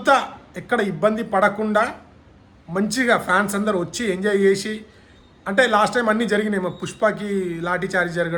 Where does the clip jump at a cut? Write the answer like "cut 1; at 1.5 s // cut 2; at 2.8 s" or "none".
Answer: none